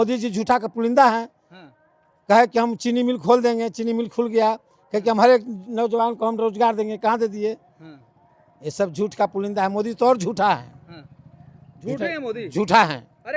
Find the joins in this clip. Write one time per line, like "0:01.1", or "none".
none